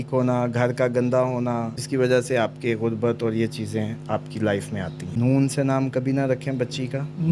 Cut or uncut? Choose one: cut